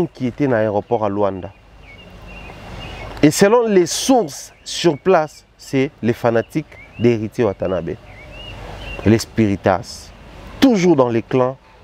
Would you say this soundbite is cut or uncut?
uncut